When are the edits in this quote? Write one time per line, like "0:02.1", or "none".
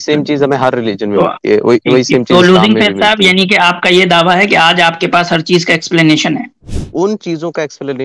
0:06.8